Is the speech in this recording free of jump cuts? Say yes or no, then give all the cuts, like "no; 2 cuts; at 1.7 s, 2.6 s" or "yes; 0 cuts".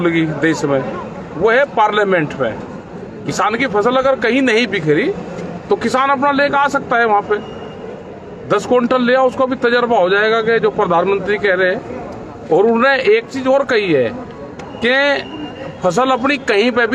yes; 0 cuts